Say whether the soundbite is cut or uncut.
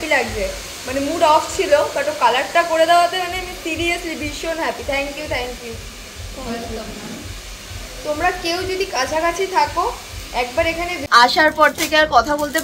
cut